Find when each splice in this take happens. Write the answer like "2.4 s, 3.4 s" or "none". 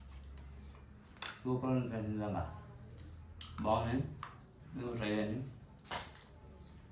none